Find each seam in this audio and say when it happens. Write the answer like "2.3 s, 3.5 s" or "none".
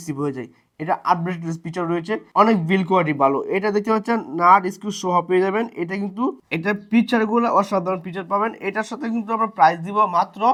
none